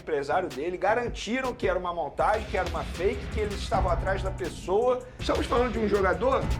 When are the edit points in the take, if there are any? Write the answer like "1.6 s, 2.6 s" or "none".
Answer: 5.1 s